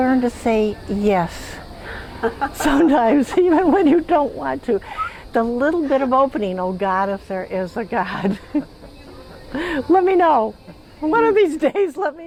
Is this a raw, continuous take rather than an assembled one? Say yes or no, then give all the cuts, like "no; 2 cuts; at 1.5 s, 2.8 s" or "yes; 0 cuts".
yes; 0 cuts